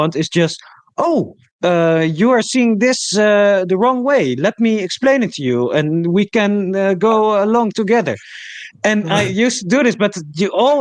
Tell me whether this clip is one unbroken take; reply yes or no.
yes